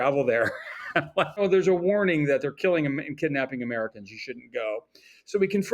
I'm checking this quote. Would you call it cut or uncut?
cut